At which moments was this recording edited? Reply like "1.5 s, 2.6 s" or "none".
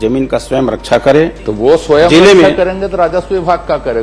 1.4 s